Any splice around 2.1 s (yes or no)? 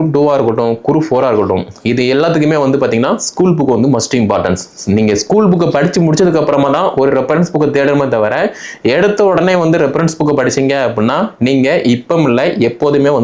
no